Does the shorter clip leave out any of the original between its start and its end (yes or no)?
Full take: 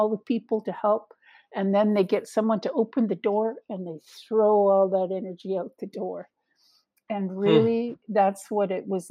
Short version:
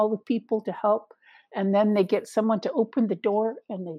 no